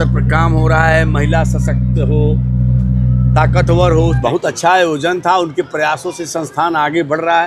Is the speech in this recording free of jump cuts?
no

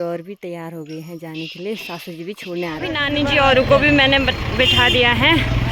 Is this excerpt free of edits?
no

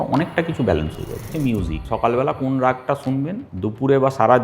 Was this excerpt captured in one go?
no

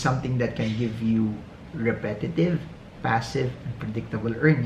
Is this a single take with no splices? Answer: yes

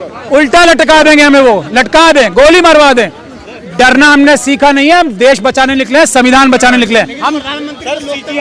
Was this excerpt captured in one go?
yes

